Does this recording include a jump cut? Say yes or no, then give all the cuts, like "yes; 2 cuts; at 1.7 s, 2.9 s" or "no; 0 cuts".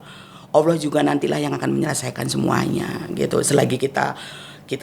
no; 0 cuts